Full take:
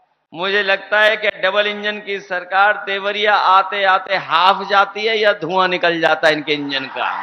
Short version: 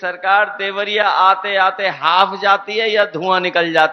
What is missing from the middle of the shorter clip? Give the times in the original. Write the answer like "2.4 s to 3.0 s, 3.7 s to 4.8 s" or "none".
none